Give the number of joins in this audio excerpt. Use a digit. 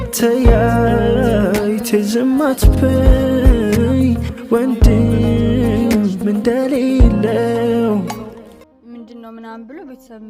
0